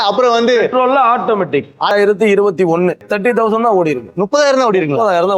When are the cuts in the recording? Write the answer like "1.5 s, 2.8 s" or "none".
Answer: 1.9 s, 3.0 s